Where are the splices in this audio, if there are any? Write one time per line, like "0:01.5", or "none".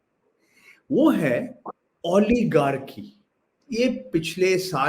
0:03.5